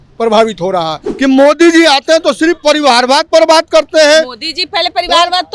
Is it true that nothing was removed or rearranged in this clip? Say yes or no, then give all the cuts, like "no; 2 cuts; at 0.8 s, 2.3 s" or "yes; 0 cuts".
no; 1 cut; at 1.1 s